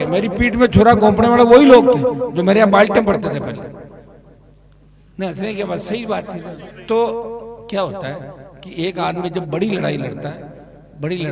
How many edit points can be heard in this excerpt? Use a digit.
0